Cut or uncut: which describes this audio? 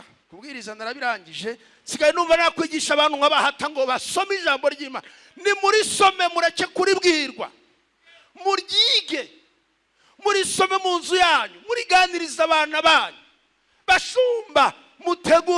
uncut